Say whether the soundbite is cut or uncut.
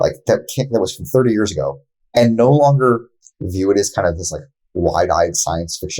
uncut